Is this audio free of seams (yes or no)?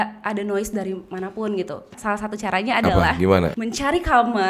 no